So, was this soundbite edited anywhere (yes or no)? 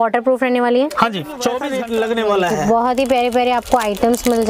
yes